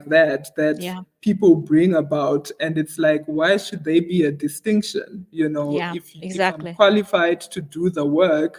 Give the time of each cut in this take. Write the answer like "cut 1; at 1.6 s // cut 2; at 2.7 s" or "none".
none